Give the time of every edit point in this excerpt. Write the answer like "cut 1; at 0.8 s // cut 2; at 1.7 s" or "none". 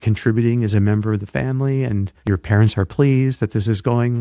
cut 1; at 2.1 s